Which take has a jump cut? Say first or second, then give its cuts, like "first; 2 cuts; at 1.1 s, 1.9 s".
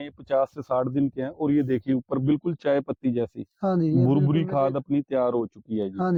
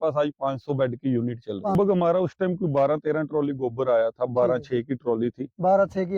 second; 1 cut; at 1.7 s